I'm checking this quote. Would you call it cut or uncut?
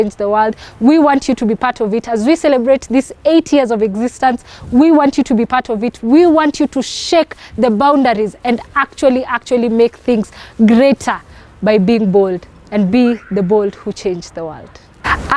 uncut